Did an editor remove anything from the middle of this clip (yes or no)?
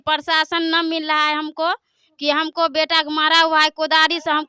no